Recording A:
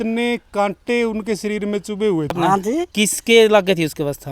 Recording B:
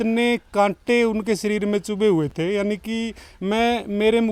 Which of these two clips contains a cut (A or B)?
A